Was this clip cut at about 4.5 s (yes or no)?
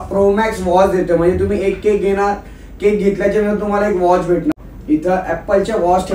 yes